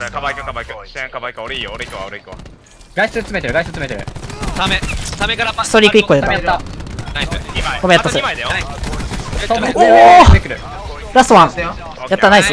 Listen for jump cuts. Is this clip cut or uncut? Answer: uncut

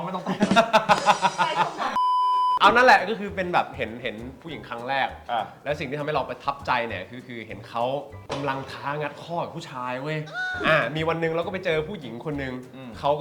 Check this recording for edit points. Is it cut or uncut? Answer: uncut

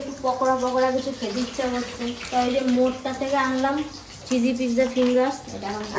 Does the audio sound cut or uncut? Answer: uncut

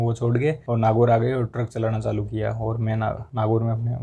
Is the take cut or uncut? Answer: uncut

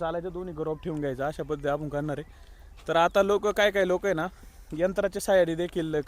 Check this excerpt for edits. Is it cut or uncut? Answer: uncut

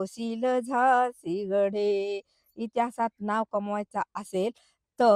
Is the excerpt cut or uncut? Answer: uncut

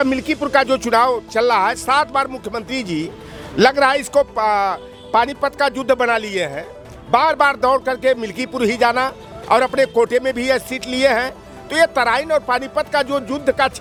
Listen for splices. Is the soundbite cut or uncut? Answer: uncut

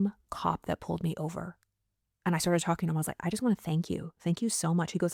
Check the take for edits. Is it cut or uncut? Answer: uncut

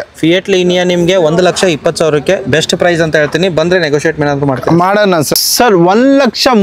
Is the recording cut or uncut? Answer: cut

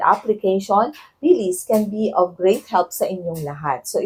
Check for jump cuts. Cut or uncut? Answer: uncut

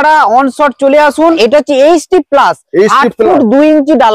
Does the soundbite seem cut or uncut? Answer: cut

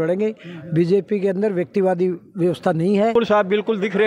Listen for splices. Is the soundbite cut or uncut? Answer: cut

